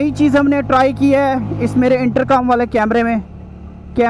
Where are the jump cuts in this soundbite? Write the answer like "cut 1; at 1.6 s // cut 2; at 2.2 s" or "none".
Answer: none